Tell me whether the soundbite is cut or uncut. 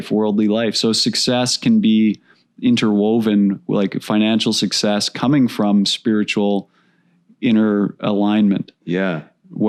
uncut